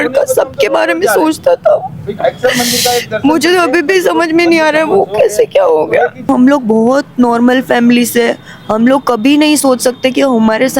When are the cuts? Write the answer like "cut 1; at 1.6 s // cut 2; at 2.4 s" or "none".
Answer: cut 1; at 6.3 s